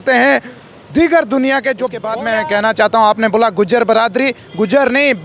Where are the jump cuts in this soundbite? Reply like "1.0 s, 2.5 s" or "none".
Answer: 2.1 s